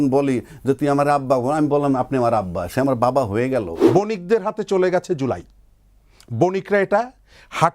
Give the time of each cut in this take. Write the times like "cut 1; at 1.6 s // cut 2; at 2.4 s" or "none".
cut 1; at 3.8 s